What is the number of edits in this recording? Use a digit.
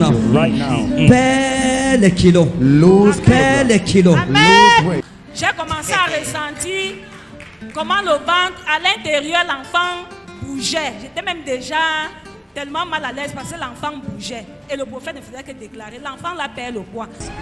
1